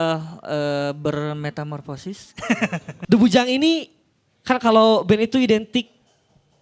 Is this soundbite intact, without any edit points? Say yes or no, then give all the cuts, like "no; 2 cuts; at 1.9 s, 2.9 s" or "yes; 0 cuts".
no; 1 cut; at 2.9 s